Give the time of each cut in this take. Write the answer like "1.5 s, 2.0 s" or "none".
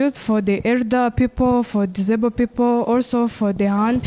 none

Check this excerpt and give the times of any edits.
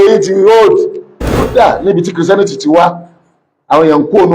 1.5 s

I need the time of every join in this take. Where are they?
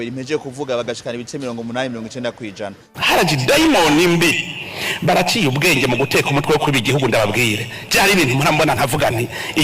2.8 s

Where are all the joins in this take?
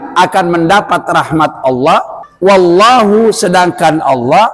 2.2 s

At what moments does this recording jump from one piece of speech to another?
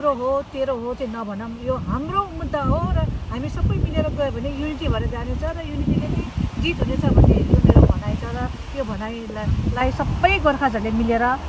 none

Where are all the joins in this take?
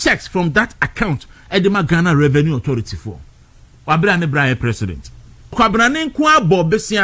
5.5 s

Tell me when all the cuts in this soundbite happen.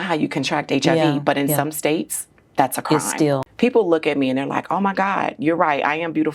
3.5 s

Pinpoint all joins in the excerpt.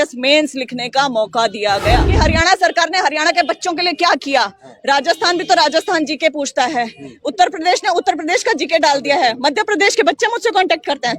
2.1 s

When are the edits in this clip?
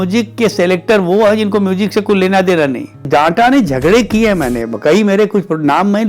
3.0 s

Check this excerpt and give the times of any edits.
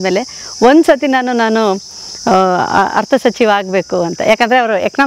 none

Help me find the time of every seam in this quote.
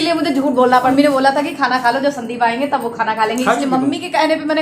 0.9 s

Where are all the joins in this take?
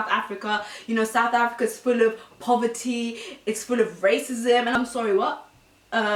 none

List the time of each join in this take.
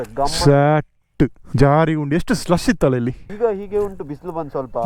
1.4 s, 3.3 s

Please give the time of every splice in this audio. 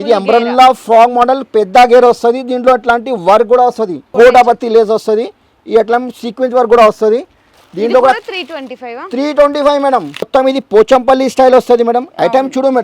4.0 s, 10.3 s

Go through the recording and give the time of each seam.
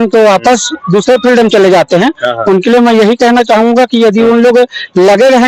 none

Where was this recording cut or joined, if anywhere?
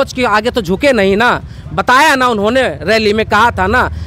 none

